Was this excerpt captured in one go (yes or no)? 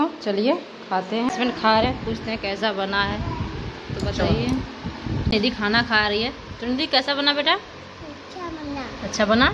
no